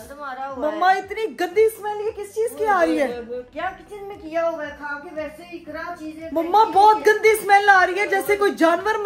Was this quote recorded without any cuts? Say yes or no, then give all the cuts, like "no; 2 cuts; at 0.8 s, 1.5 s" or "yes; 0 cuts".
yes; 0 cuts